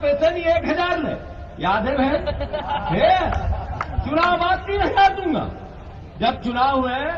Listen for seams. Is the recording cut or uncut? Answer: uncut